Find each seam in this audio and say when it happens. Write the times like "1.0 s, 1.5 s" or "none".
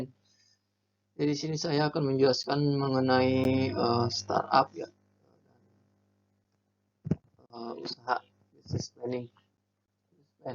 1.2 s